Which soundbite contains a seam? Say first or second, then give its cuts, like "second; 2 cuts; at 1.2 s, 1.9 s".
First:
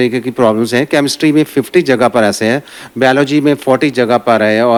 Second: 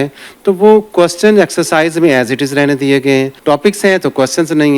second; 1 cut; at 3.3 s